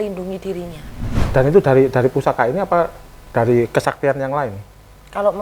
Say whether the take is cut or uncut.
cut